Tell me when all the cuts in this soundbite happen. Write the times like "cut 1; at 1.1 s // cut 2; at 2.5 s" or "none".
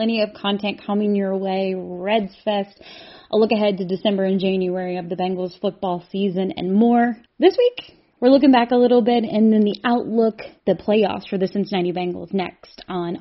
cut 1; at 7.2 s // cut 2; at 10.5 s